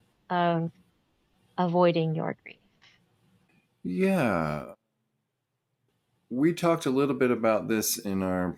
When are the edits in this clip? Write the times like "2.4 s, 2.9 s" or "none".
none